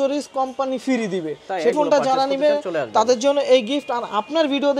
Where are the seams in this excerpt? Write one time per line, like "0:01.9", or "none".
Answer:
0:01.7